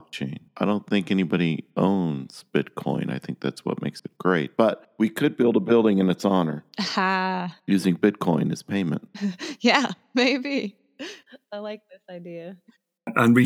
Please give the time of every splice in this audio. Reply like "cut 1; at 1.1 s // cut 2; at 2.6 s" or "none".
none